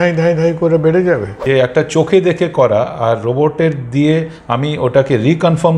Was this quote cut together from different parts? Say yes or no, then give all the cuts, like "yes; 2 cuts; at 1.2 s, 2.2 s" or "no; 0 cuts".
yes; 1 cut; at 1.3 s